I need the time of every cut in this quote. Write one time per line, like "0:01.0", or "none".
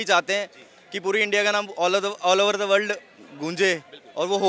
none